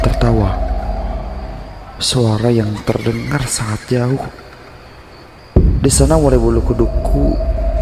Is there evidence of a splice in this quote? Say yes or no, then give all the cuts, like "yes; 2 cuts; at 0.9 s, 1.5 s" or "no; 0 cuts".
no; 0 cuts